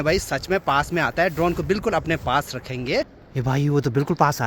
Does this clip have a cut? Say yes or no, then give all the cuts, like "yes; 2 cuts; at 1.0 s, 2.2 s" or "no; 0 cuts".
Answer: yes; 1 cut; at 3.2 s